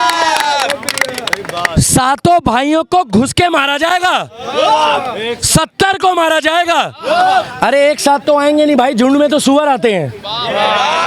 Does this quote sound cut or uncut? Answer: uncut